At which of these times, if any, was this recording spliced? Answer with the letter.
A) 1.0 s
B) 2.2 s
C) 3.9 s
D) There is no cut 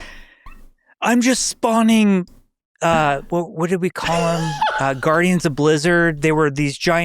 D